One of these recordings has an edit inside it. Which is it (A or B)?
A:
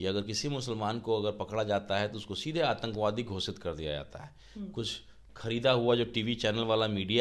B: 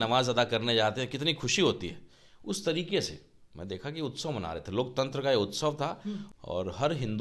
B